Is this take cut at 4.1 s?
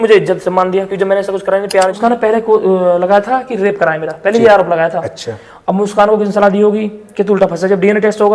no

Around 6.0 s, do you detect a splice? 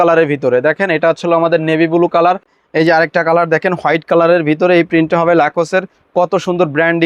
no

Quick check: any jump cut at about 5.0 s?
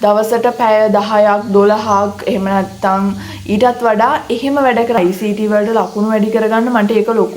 yes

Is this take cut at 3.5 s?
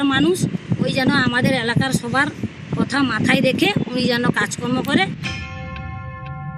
no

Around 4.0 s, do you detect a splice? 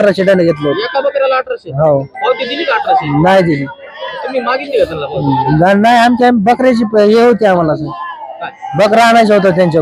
no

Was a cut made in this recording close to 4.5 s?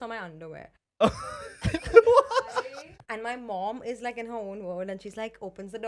no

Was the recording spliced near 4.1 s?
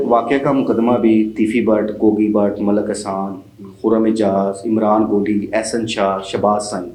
no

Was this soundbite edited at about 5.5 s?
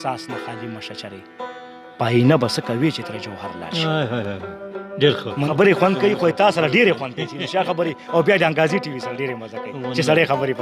yes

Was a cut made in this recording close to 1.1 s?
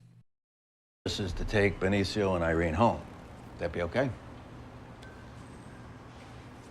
yes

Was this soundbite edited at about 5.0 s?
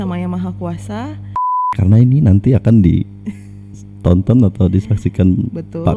no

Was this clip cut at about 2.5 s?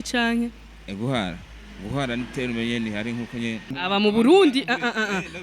no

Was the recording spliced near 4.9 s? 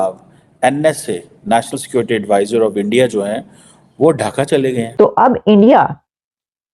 yes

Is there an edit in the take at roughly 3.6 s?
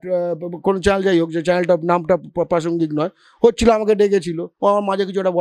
no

